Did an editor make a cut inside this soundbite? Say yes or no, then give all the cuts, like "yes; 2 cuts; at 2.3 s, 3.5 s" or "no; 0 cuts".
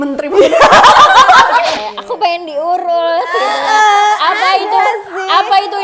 yes; 1 cut; at 1.7 s